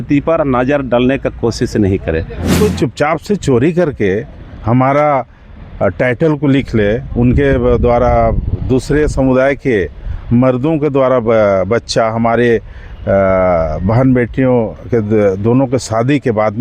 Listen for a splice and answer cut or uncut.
cut